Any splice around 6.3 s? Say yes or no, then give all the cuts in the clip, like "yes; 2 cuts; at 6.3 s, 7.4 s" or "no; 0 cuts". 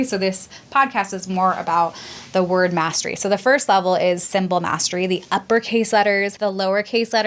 yes; 1 cut; at 6.3 s